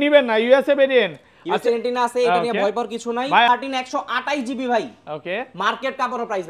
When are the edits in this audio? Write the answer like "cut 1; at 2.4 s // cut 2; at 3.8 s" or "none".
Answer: cut 1; at 3.5 s